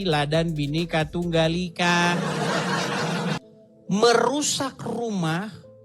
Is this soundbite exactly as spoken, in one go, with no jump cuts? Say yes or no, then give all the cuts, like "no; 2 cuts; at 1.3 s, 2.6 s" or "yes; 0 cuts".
no; 1 cut; at 3.4 s